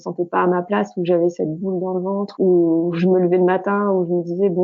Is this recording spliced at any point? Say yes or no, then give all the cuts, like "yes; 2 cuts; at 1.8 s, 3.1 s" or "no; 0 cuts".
yes; 1 cut; at 2.3 s